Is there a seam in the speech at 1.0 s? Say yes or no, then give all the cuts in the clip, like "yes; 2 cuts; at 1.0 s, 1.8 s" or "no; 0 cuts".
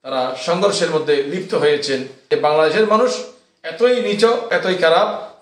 no; 2 cuts; at 2.2 s, 4.5 s